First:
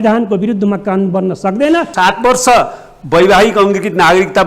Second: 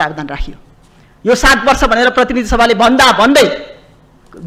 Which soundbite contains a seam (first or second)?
first